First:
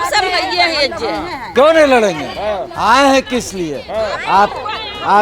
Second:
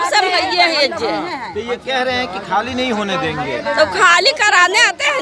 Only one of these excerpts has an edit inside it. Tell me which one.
first; 1 cut; at 1.4 s

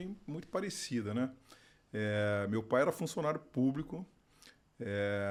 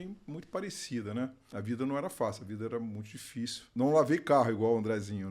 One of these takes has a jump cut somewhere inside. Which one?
second; 2 cuts; at 1.5 s, 3.7 s

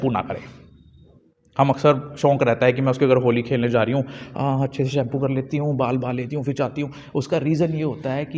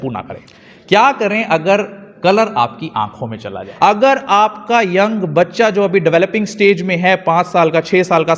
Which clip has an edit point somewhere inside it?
second; 2 cuts; at 1.1 s, 4.0 s

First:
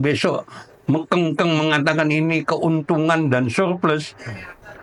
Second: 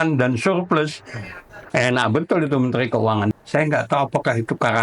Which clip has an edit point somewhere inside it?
second; 1 cut; at 3.3 s

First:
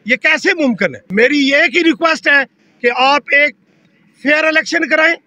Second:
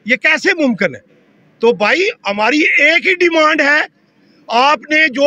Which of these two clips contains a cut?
first; 1 cut; at 1.0 s

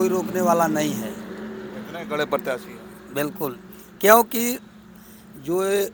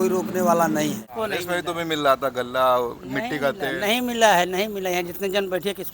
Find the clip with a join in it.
second; 1 cut; at 1.1 s

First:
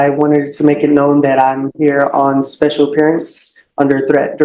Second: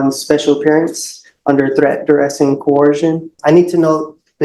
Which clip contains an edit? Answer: second; 1 cut; at 3.3 s

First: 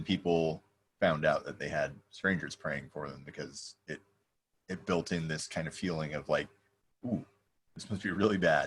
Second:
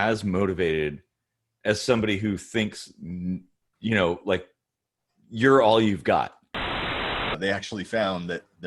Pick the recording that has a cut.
second; 1 cut; at 6.9 s

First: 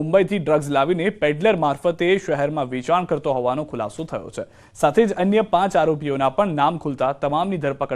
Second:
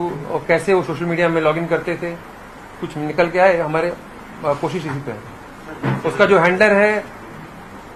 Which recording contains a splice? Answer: first; 1 cut; at 3.5 s

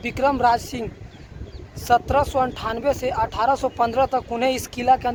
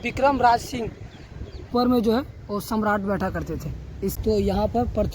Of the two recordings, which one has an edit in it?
second; 2 cuts; at 1.7 s, 4.2 s

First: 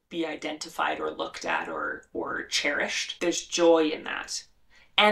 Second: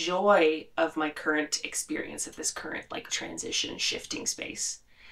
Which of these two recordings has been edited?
first; 1 cut; at 3.0 s

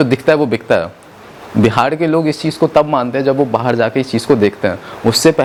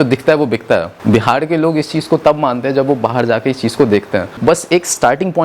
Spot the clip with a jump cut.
second; 2 cuts; at 0.9 s, 4.4 s

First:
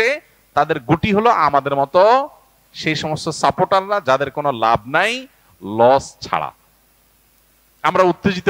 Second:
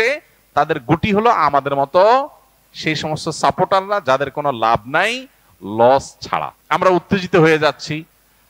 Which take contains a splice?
second; 1 cut; at 6.5 s

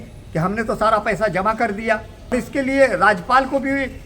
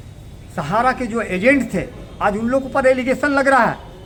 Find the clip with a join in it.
first; 1 cut; at 2.3 s

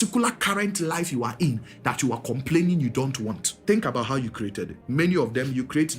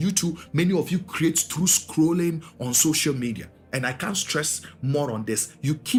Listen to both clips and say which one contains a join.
first; 2 cuts; at 3.5 s, 4.8 s

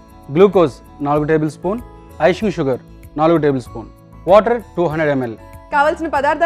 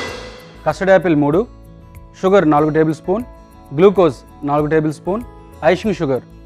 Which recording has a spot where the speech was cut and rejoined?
first; 1 cut; at 5.4 s

